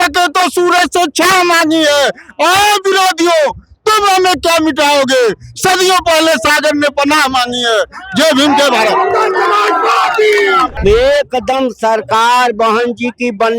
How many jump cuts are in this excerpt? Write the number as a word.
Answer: one